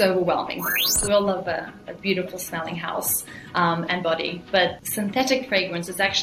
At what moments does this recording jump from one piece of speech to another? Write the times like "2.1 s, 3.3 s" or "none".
0.9 s, 4.8 s